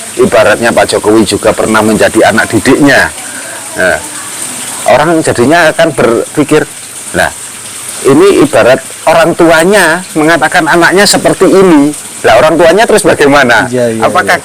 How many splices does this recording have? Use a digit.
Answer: 0